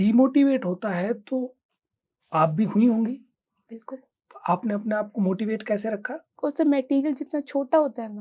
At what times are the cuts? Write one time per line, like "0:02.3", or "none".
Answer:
0:06.2